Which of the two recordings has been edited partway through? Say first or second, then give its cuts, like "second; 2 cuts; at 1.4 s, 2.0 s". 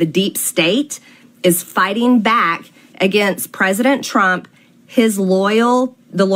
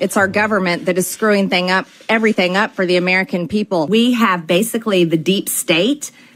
second; 1 cut; at 3.9 s